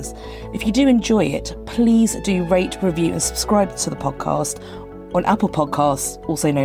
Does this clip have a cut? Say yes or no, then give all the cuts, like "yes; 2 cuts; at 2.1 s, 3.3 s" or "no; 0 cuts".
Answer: no; 0 cuts